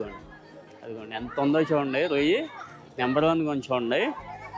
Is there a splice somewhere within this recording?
no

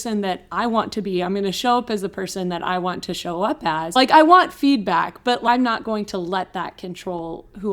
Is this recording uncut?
no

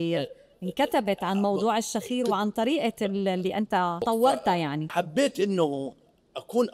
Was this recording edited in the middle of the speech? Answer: yes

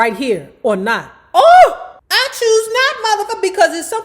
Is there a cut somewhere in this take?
yes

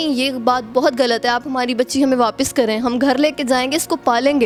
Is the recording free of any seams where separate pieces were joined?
yes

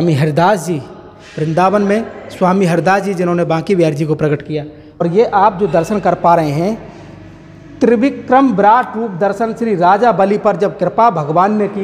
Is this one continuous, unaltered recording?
no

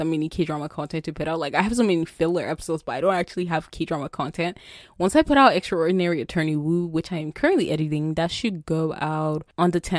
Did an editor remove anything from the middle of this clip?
no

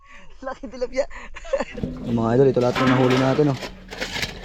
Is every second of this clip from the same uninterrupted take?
no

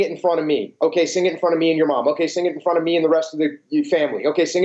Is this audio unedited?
yes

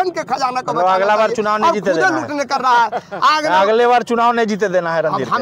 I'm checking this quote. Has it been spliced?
no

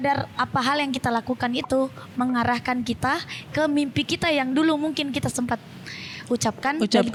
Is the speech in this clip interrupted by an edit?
no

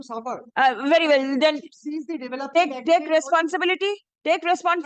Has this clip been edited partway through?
no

